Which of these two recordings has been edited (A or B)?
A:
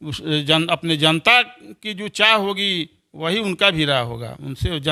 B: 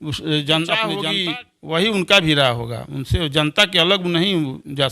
B